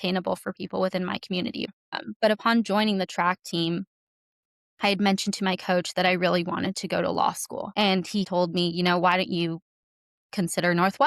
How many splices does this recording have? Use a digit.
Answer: 1